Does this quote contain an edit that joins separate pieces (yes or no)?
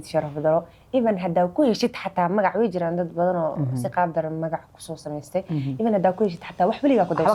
no